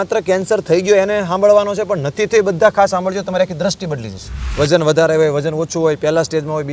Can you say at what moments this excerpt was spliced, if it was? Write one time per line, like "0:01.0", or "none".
0:04.4